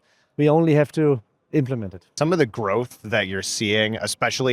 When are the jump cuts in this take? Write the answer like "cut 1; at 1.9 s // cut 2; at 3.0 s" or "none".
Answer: cut 1; at 2.0 s